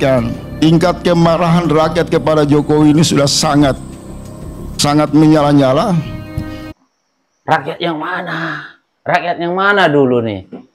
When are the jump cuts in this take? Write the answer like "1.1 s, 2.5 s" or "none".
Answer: none